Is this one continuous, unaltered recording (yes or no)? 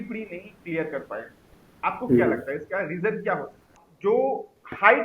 no